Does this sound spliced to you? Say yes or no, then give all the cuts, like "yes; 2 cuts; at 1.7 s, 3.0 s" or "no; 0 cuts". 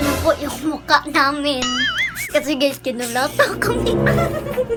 no; 0 cuts